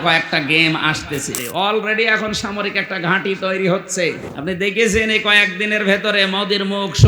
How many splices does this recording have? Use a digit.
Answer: 2